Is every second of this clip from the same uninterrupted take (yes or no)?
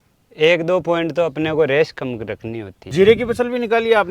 no